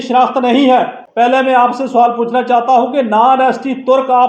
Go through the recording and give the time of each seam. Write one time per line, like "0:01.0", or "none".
0:01.0